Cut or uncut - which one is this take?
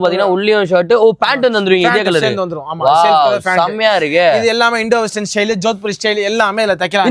uncut